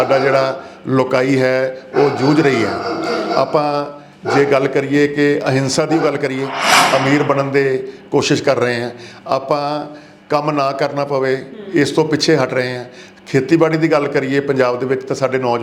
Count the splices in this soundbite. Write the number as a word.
one